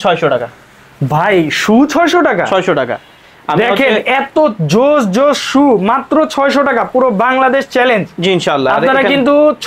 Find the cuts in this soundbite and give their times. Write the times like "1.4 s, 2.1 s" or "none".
none